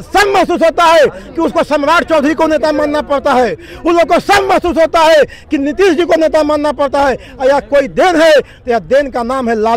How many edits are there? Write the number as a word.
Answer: zero